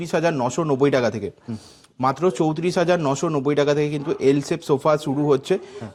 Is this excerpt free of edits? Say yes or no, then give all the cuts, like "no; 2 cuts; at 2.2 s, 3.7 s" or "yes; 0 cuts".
yes; 0 cuts